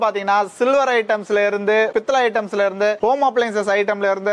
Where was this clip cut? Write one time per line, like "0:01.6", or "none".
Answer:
none